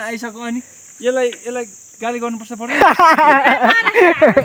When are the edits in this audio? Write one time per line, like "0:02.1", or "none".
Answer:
none